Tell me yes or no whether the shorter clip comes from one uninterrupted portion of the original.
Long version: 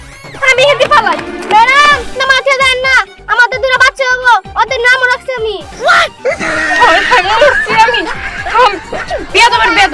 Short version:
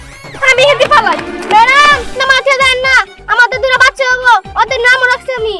yes